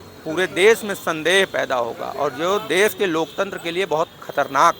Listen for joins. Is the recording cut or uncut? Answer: uncut